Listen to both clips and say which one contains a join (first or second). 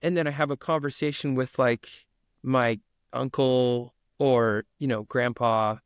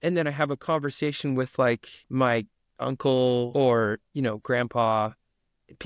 second